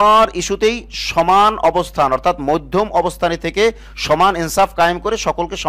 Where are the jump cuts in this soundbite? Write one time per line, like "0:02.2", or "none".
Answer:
none